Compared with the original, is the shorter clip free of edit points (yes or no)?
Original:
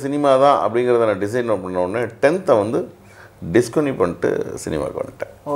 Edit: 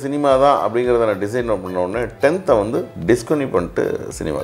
no